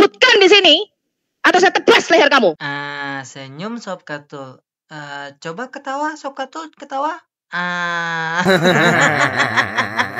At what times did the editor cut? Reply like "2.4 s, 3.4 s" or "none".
2.6 s

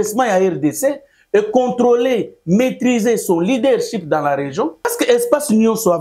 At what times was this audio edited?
4.9 s

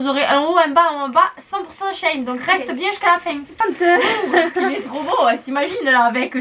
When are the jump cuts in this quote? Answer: 3.6 s

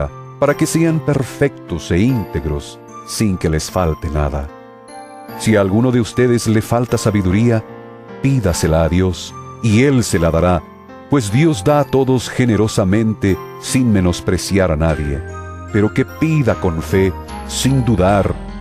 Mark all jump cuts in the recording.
8.9 s

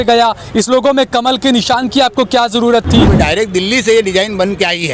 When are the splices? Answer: 3.1 s

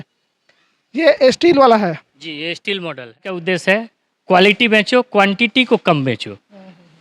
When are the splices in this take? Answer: 3.4 s

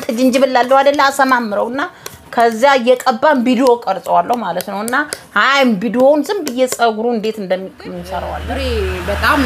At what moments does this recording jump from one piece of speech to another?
8.3 s

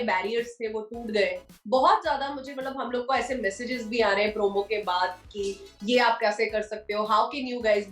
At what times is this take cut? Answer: 1.5 s

